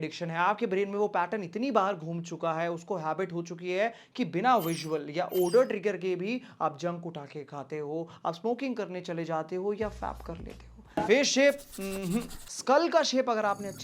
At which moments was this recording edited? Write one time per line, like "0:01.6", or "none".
0:11.0